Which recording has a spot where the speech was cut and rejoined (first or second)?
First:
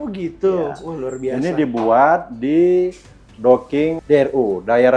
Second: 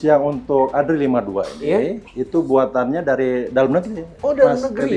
first